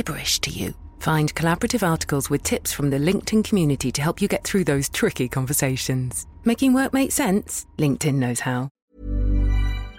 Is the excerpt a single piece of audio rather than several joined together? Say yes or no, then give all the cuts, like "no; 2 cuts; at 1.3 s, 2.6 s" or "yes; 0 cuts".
no; 1 cut; at 8.8 s